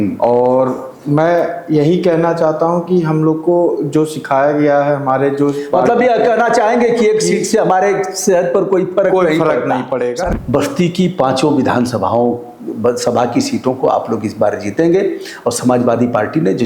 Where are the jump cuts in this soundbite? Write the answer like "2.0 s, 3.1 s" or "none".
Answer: 10.2 s